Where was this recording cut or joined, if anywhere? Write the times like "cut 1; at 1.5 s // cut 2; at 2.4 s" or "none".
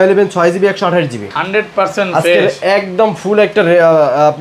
none